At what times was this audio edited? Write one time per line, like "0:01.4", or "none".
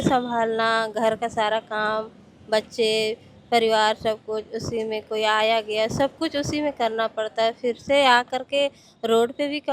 none